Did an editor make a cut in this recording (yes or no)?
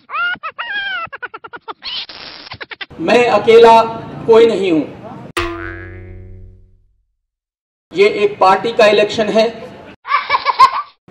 yes